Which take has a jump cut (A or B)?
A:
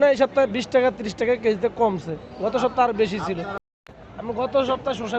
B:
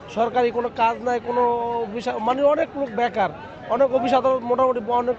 A